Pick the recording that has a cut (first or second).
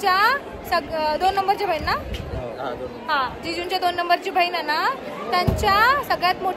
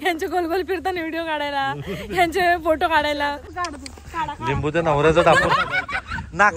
second